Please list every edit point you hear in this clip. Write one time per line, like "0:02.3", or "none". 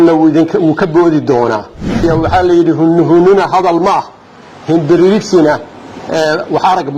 0:02.0